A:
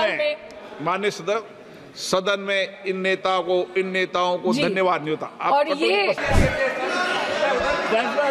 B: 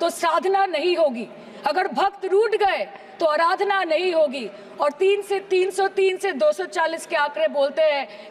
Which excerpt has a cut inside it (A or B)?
A